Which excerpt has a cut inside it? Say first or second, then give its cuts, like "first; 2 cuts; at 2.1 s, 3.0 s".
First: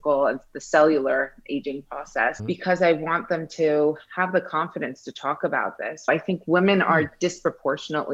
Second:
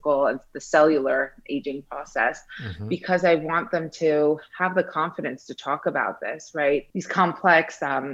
first; 2 cuts; at 2.4 s, 6.1 s